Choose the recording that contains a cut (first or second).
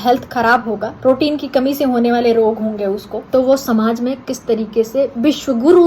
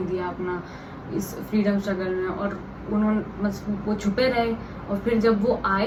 first